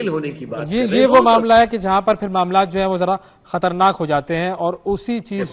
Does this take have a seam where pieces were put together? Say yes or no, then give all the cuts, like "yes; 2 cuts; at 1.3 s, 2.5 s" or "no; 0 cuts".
no; 0 cuts